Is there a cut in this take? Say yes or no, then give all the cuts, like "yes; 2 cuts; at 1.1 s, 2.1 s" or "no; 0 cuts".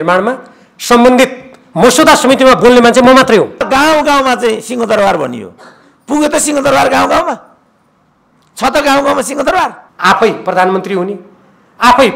yes; 2 cuts; at 3.6 s, 9.9 s